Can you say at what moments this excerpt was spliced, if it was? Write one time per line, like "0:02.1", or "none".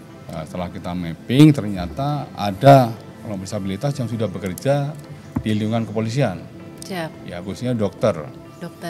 none